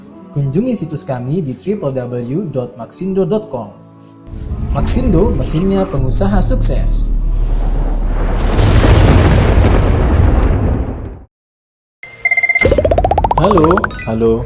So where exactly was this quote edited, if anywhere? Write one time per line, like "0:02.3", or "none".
0:12.0